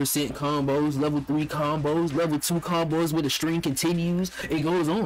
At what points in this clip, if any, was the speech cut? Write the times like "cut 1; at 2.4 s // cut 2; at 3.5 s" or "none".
none